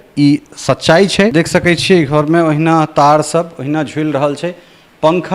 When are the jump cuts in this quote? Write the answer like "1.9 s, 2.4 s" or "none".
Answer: 1.3 s